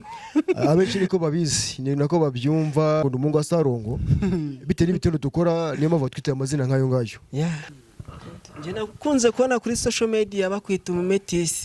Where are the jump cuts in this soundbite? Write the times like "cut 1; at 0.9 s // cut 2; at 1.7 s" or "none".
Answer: cut 1; at 3.0 s // cut 2; at 7.7 s